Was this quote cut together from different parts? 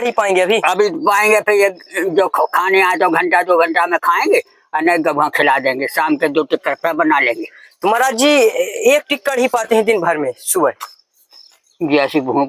no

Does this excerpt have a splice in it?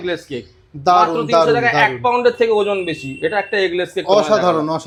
no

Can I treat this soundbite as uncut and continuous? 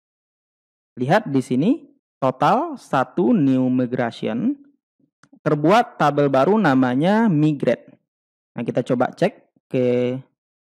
yes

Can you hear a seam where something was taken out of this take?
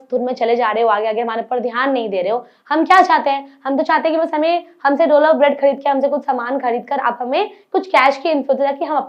no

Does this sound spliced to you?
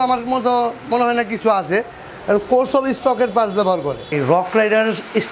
yes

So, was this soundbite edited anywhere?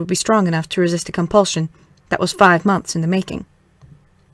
no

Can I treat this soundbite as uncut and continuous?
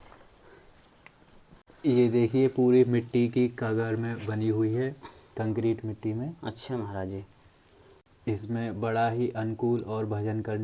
yes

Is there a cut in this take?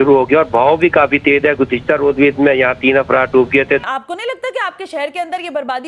yes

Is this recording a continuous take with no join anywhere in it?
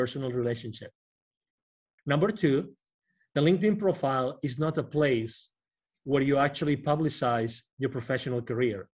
no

